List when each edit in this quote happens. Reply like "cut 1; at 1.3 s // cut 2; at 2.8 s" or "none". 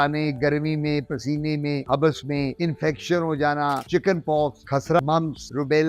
cut 1; at 3.8 s // cut 2; at 4.9 s